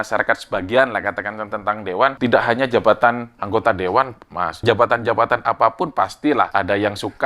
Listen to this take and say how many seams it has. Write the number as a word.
three